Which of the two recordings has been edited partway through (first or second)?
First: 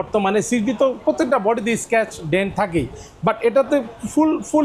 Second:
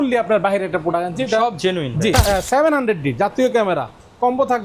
second